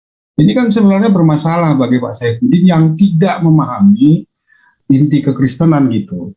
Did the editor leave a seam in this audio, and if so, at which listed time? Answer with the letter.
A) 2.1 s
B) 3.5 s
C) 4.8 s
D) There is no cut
C